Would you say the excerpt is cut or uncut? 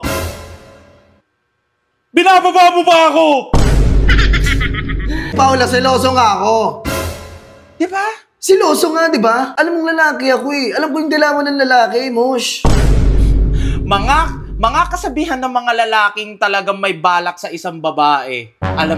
cut